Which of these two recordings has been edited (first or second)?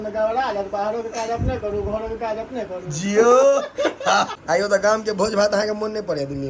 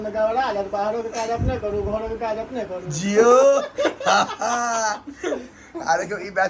first